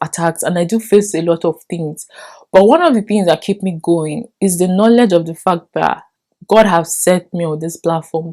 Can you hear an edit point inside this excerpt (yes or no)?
no